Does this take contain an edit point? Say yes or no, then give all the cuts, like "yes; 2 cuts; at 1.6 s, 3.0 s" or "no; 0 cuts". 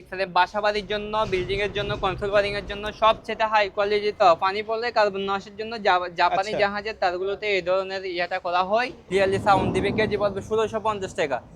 yes; 2 cuts; at 4.2 s, 9.0 s